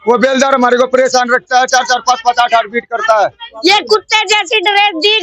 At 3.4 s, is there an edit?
yes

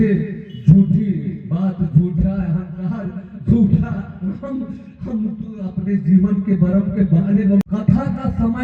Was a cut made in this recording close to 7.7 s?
yes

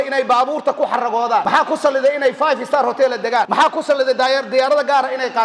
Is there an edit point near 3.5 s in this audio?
yes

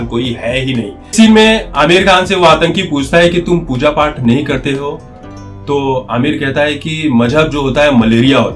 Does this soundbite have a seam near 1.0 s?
yes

